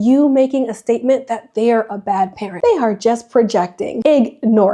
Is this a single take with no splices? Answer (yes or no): no